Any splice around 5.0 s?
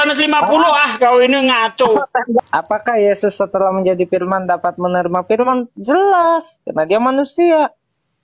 no; 1 cut; at 2.4 s

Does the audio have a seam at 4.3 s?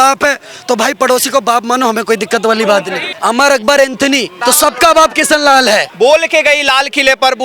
yes; 3 cuts; at 3.0 s, 4.3 s, 5.9 s

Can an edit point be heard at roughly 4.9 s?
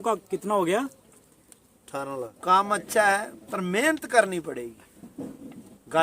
no; 1 cut; at 2.3 s

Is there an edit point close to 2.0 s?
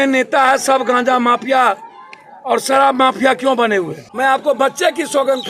no; 1 cut; at 4.0 s

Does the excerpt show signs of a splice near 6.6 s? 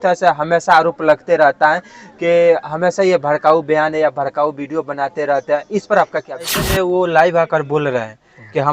yes; 1 cut; at 6.6 s

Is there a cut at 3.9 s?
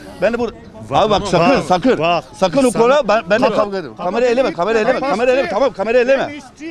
yes; 1 cut; at 3.9 s

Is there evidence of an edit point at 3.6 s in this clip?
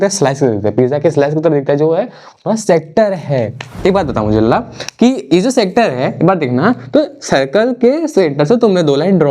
yes; 1 cut; at 3.6 s

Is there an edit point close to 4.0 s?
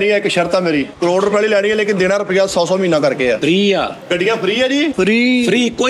yes; 4 cuts; at 0.9 s, 3.4 s, 4.0 s, 4.9 s

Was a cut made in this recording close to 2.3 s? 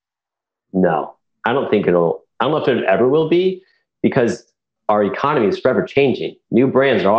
no; 1 cut; at 4.7 s

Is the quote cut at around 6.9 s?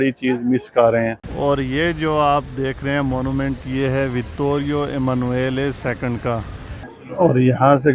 yes; 2 cuts; at 1.2 s, 6.9 s

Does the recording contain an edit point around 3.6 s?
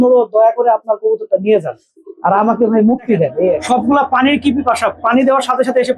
yes; 1 cut; at 3.6 s

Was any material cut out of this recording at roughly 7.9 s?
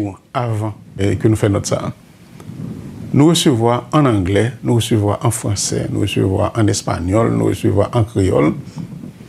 no; 1 cut; at 1.0 s

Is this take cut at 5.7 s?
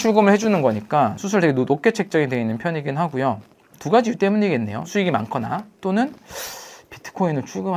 no; 0 cuts

